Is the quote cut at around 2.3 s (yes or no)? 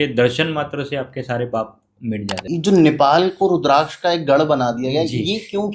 yes